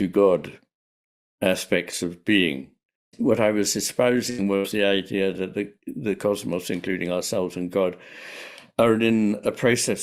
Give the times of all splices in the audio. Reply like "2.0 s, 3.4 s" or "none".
3.1 s